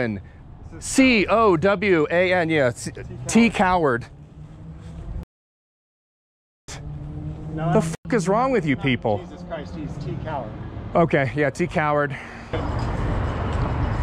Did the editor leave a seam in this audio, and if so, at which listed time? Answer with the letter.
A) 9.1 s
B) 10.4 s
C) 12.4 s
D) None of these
C